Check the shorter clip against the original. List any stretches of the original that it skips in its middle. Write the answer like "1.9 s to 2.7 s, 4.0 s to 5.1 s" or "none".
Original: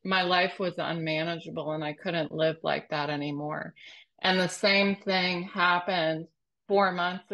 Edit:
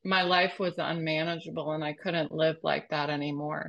none